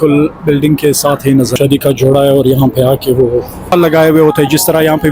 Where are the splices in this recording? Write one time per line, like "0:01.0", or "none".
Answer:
0:01.6
0:03.7